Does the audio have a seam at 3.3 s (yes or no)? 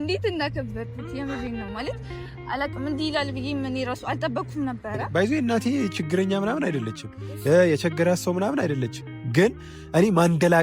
no